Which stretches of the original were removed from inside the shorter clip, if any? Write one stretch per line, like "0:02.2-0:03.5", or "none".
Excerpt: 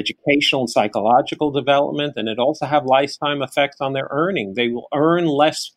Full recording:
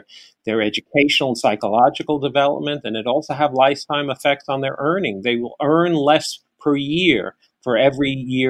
none